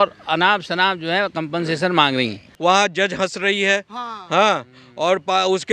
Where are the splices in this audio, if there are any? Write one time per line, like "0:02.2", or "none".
0:02.5